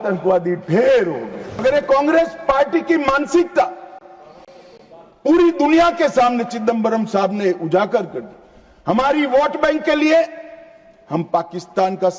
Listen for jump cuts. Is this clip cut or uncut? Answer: cut